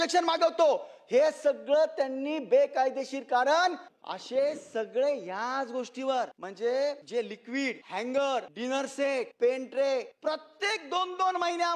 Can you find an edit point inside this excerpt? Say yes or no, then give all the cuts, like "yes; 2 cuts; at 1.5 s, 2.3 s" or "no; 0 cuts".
yes; 5 cuts; at 3.9 s, 6.4 s, 7.4 s, 8.9 s, 10.1 s